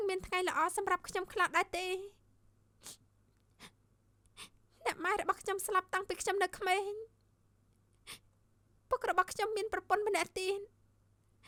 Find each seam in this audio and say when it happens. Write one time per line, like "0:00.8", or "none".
none